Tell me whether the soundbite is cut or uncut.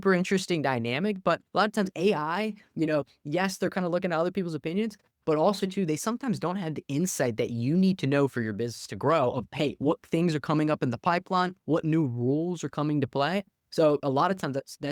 uncut